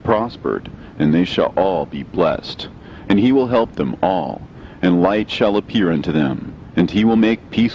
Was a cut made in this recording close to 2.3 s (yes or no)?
no